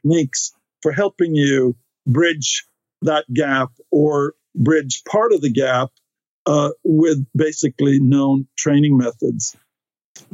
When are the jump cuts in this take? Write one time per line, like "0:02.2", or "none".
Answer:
none